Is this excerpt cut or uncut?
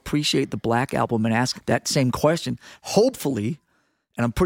cut